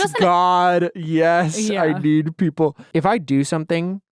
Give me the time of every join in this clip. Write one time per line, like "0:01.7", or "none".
0:02.8